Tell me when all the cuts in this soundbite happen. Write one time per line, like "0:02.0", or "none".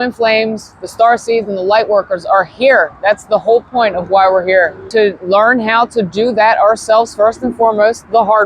0:04.8